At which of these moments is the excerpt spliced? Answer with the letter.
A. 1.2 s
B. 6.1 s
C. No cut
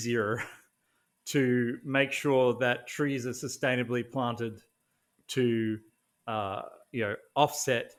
C